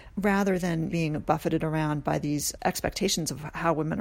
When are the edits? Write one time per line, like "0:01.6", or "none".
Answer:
0:00.9
0:02.6

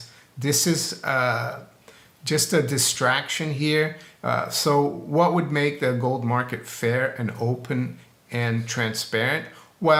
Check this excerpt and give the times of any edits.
none

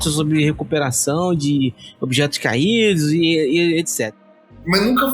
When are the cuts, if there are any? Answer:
0:04.1

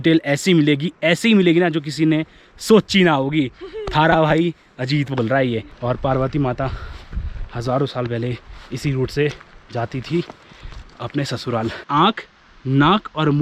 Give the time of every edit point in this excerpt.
0:05.6
0:11.8

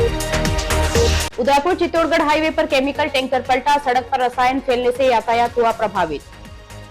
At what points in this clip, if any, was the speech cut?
0:01.1

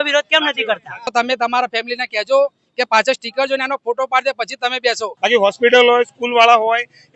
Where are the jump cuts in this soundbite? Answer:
0:00.9
0:05.1

